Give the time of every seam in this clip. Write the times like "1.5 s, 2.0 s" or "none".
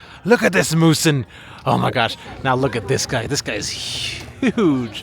2.2 s